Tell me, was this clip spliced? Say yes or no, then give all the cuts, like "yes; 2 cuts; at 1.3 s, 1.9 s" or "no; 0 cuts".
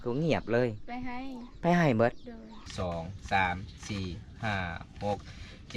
yes; 1 cut; at 2.5 s